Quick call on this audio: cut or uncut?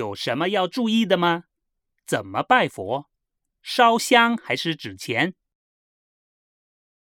uncut